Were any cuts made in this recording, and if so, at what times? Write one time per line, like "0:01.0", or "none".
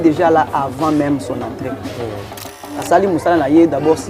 0:02.5